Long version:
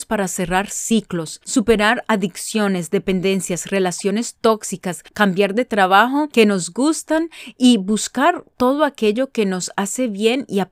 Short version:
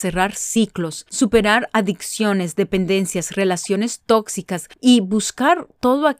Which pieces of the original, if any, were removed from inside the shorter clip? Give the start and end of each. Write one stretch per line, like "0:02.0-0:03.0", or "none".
0:05.0-0:07.4